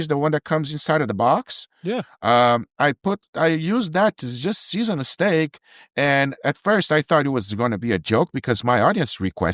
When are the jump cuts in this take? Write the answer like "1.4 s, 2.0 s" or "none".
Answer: none